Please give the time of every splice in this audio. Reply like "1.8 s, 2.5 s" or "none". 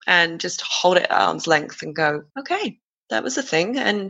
2.3 s